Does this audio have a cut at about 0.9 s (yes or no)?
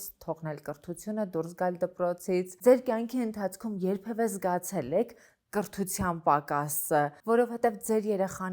no